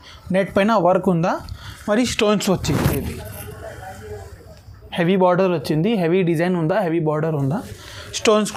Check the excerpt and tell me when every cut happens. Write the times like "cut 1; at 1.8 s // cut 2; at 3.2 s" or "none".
none